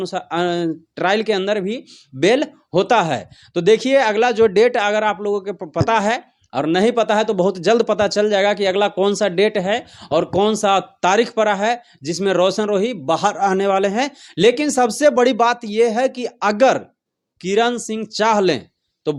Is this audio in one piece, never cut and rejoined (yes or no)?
yes